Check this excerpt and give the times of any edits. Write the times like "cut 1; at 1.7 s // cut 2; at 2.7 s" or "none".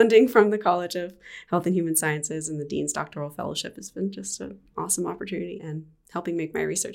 cut 1; at 5.5 s